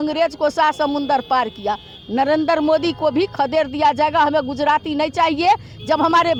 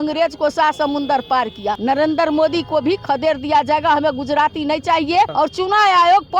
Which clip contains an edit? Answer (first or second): second